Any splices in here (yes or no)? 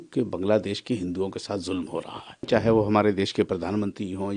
yes